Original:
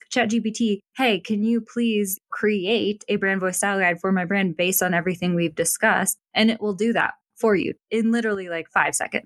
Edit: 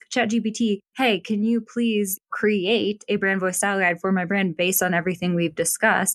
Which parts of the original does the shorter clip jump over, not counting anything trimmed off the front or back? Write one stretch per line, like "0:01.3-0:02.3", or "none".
none